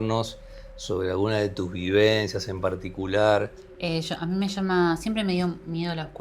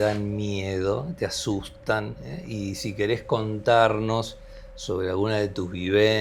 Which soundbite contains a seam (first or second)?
first